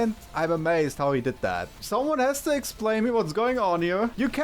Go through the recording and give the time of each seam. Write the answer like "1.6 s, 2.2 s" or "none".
1.7 s